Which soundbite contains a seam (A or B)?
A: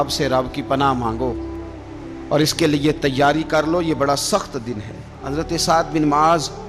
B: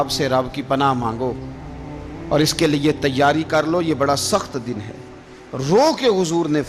A